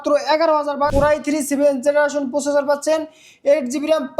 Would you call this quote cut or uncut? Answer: cut